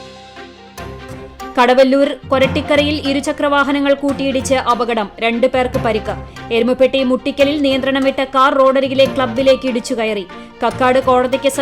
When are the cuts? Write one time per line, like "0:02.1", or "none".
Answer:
0:01.2